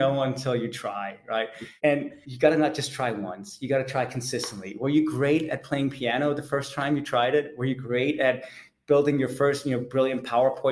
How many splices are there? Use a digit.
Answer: 1